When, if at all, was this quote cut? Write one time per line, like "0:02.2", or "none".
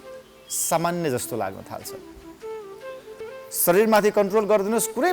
0:03.2